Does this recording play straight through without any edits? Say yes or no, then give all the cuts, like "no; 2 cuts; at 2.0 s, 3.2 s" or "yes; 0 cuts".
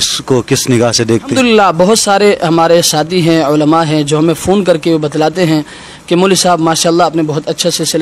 no; 1 cut; at 1.3 s